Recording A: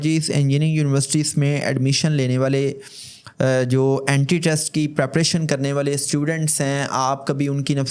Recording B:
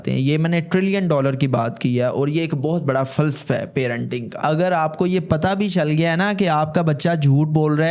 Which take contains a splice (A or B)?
B